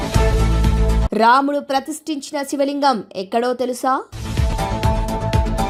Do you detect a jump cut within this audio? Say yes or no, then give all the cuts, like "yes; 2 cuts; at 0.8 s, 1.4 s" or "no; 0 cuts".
no; 0 cuts